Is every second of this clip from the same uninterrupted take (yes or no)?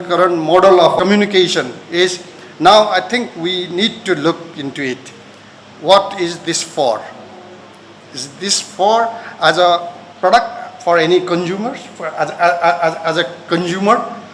no